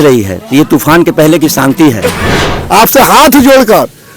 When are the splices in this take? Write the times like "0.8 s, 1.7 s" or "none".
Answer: 2.5 s